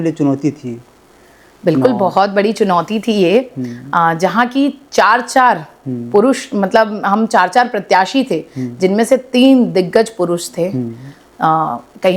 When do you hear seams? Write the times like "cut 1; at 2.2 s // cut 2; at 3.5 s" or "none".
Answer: none